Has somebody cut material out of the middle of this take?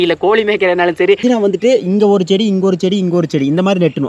yes; 1 cut; at 1.2 s

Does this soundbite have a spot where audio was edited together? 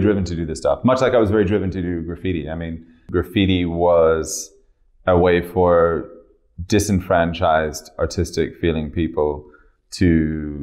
yes; 1 cut; at 3.0 s

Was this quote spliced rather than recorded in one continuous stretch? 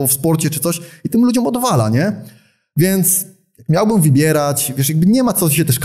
no; 0 cuts

